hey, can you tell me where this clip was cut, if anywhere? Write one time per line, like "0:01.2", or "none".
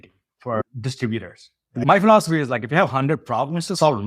0:01.8